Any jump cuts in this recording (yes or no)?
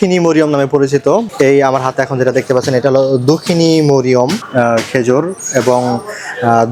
no